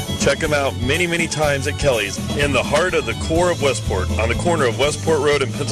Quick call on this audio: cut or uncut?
uncut